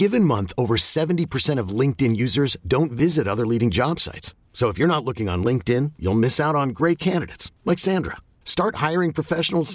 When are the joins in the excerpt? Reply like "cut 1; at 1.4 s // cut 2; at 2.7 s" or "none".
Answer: none